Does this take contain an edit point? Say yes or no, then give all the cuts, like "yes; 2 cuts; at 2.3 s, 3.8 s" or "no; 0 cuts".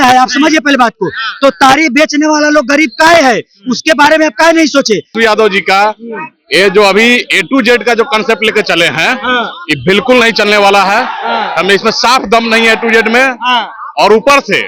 yes; 1 cut; at 5.1 s